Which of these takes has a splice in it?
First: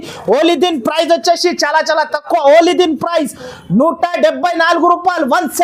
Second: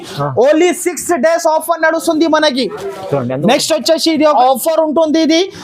second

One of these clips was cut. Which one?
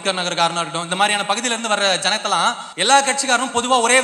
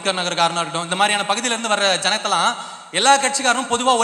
first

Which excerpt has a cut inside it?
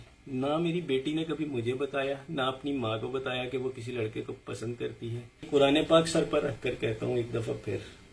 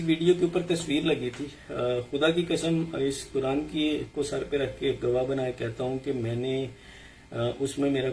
first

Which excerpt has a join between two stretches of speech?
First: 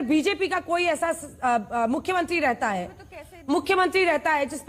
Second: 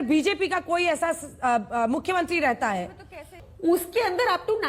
second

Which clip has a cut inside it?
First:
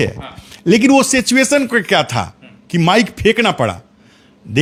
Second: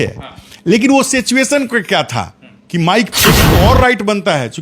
second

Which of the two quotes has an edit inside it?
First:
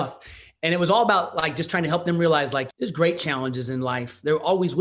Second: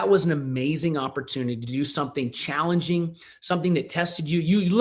first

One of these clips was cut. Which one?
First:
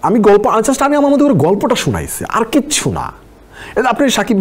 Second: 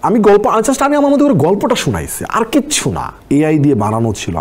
second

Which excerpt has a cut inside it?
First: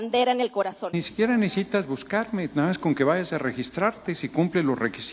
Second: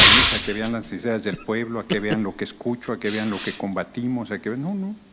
first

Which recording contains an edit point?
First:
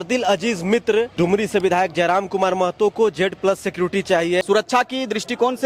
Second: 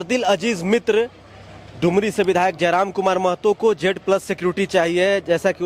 first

